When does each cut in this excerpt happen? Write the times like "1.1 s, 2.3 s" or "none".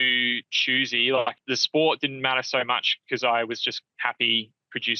1.4 s